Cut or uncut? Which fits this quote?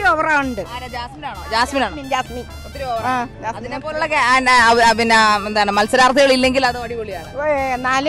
uncut